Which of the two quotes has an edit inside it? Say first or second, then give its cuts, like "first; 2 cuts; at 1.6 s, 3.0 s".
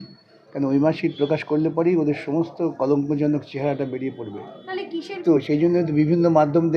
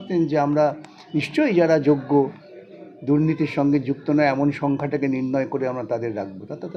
first; 1 cut; at 5.4 s